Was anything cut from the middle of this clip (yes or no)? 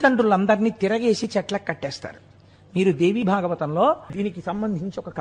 yes